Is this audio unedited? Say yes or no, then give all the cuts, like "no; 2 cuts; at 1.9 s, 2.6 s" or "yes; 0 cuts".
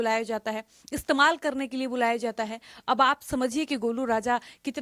yes; 0 cuts